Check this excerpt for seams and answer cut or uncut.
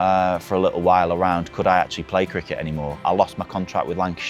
cut